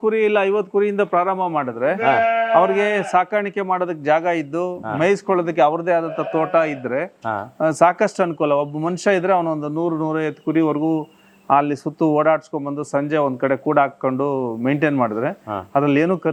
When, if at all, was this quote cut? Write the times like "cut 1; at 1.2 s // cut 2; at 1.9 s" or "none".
none